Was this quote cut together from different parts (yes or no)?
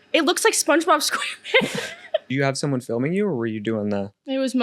yes